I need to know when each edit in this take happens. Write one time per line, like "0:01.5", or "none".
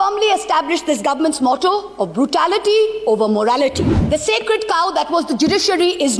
0:04.0

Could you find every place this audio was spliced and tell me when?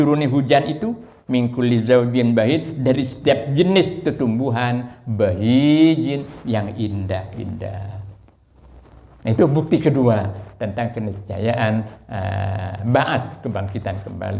none

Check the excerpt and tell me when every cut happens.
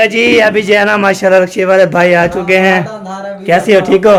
none

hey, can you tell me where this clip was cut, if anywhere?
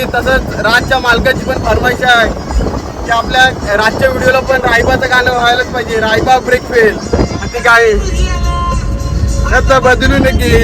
none

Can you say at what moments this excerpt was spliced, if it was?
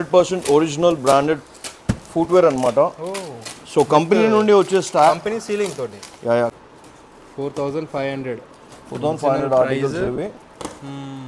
0:06.5

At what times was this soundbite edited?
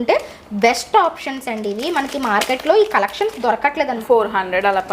0:04.0

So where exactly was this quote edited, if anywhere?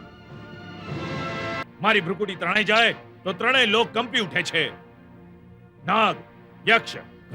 0:01.6

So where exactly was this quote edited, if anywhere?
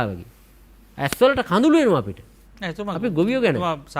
none

